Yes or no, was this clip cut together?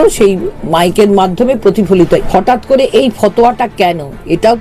yes